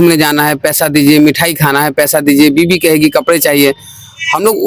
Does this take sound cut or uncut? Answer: uncut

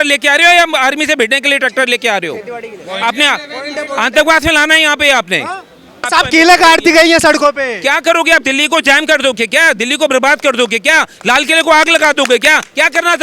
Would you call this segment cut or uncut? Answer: cut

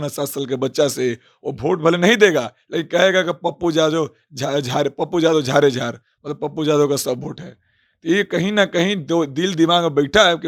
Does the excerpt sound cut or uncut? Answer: uncut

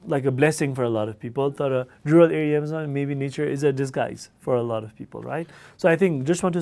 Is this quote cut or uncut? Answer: uncut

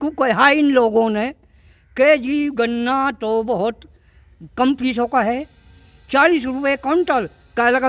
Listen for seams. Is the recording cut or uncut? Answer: uncut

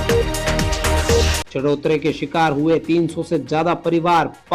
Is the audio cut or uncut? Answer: cut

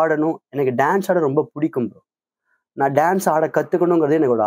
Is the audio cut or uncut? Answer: uncut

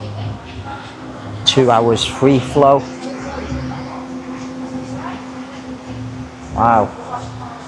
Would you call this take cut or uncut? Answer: uncut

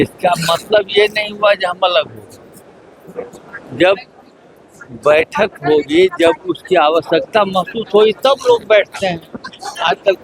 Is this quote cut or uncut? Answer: uncut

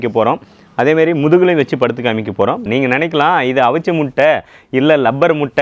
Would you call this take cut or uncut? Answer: cut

